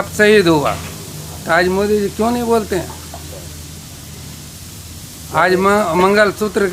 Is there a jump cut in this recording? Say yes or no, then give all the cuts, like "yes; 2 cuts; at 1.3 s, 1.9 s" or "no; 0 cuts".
no; 0 cuts